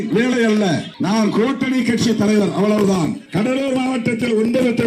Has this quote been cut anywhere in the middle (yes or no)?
yes